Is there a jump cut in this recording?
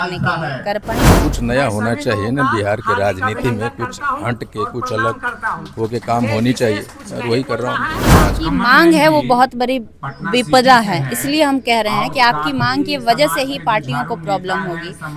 yes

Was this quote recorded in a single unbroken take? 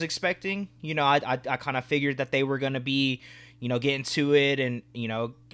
yes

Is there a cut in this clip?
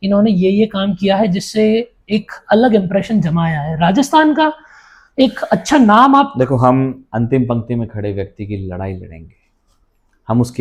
no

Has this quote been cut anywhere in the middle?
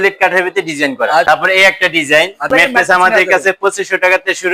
yes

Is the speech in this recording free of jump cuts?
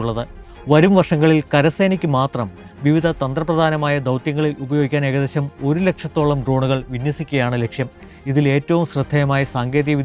yes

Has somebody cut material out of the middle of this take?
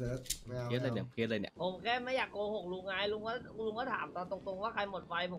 yes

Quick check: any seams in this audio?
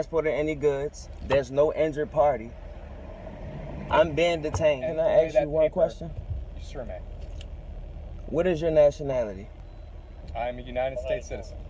yes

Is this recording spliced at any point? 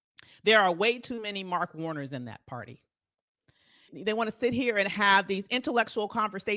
no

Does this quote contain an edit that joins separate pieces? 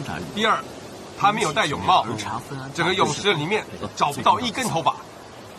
no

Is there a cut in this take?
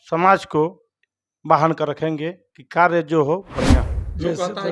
yes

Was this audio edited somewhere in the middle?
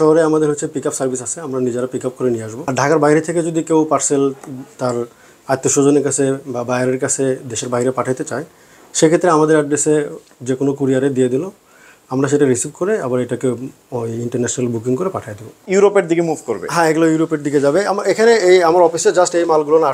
yes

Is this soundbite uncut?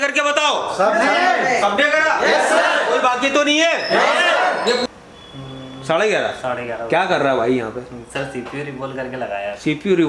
no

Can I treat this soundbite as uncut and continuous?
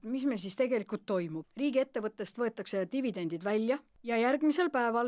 no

